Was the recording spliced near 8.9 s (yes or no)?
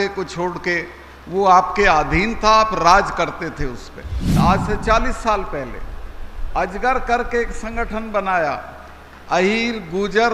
no